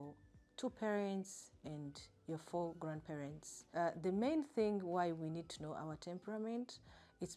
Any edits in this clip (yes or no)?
yes